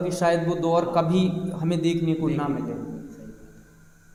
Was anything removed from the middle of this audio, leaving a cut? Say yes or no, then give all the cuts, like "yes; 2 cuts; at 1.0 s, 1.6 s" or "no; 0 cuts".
no; 0 cuts